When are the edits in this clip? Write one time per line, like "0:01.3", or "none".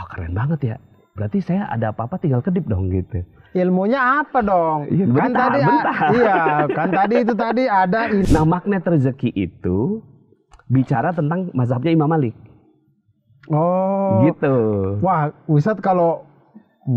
0:08.2